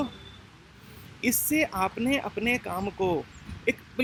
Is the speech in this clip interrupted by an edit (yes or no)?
no